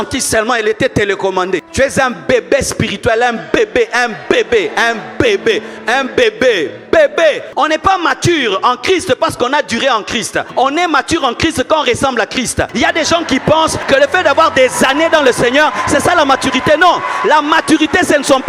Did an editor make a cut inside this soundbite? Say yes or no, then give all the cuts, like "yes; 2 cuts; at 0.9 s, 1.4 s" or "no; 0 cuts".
yes; 5 cuts; at 1.7 s, 7.5 s, 10.4 s, 12.7 s, 13.8 s